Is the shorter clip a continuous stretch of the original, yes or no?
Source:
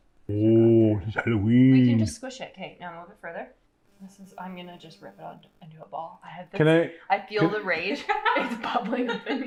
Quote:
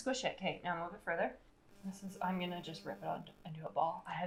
yes